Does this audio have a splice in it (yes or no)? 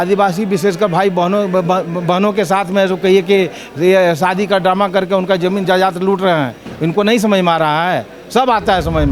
no